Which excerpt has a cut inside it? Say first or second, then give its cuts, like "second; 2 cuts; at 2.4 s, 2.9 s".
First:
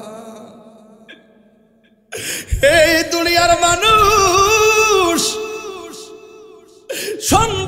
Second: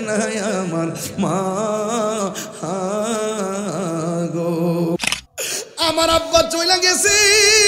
second; 1 cut; at 5.0 s